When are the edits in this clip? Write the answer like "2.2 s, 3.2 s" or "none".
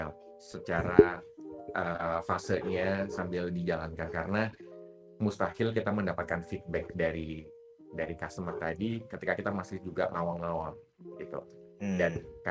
none